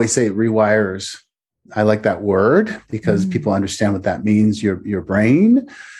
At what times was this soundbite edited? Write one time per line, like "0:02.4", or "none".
none